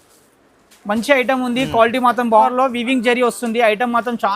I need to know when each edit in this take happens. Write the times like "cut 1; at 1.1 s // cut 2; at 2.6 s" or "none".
cut 1; at 2.5 s